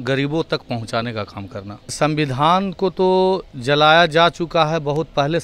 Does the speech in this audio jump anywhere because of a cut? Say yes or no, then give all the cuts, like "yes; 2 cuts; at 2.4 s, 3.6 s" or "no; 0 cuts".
yes; 1 cut; at 1.9 s